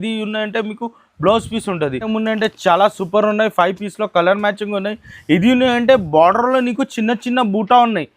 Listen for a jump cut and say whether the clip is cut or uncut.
cut